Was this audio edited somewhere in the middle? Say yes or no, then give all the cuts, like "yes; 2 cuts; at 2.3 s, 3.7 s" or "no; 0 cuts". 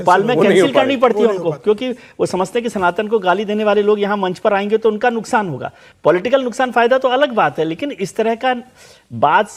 no; 0 cuts